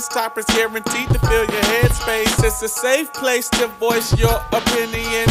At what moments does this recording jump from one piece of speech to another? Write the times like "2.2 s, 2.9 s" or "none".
none